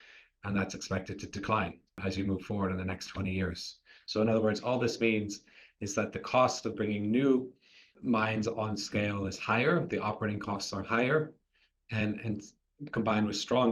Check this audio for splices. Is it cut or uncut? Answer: cut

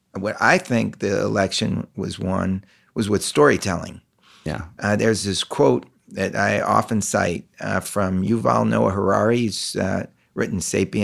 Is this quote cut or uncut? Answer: uncut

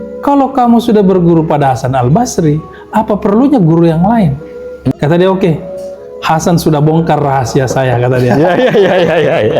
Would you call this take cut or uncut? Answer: cut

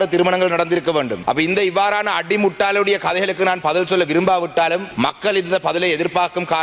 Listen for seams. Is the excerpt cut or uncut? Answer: cut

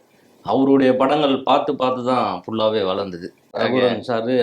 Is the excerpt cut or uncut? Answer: cut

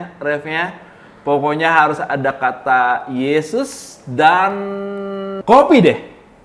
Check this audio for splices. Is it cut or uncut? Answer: cut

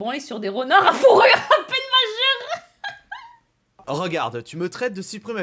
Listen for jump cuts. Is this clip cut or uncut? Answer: cut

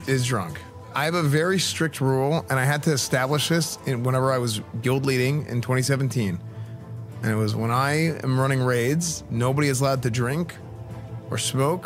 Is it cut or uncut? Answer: cut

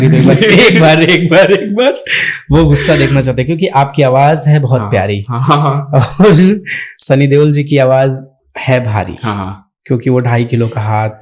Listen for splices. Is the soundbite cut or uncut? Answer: uncut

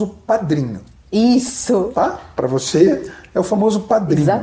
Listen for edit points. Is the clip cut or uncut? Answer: uncut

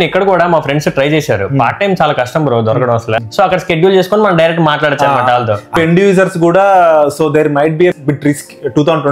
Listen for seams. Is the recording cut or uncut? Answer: cut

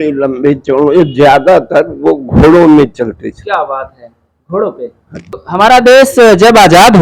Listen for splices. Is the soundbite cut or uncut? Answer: cut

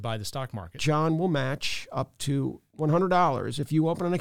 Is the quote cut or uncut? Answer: cut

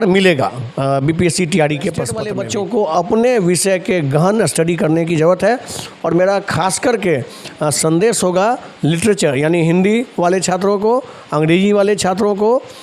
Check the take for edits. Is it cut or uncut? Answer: cut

